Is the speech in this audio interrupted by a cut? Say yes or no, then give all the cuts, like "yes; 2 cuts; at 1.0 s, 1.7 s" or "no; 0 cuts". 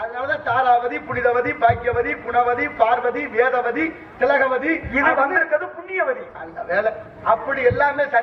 no; 0 cuts